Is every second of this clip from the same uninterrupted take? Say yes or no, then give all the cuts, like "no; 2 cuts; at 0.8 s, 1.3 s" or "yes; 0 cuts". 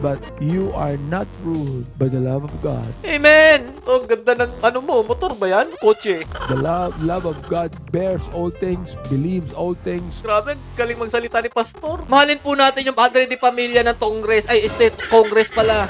no; 4 cuts; at 3.8 s, 6.3 s, 10.2 s, 12.0 s